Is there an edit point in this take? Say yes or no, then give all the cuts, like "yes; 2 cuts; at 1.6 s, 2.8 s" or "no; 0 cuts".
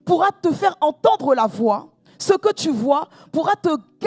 no; 0 cuts